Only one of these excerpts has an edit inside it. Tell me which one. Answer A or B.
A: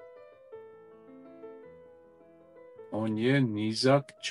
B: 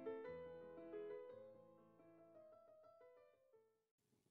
A